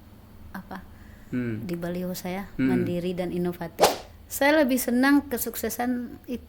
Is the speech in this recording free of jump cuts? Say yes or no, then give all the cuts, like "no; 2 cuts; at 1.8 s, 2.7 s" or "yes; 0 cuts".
no; 1 cut; at 4.0 s